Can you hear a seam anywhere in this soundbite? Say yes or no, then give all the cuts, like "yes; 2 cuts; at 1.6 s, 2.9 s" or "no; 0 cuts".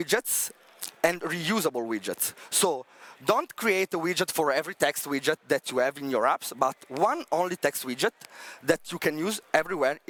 no; 0 cuts